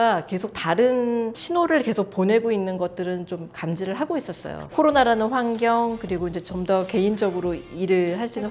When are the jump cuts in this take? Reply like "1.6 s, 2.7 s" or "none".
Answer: 4.7 s